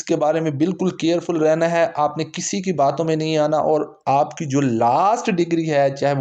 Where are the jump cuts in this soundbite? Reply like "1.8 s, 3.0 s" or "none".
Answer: none